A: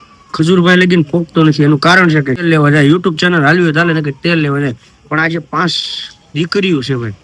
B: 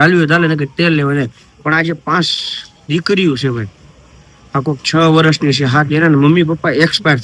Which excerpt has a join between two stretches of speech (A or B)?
A